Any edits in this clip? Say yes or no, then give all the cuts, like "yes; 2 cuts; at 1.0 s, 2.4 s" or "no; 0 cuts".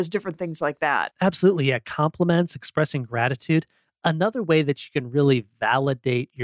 yes; 1 cut; at 1.1 s